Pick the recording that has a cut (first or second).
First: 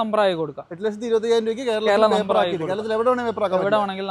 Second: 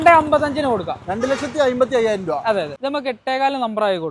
second